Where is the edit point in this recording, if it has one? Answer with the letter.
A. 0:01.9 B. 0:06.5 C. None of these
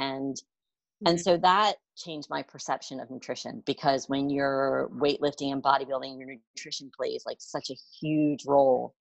A